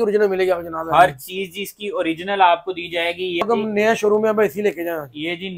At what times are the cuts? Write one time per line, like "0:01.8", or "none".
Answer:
0:03.4